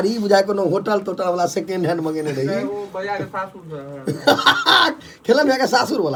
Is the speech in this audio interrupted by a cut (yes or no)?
no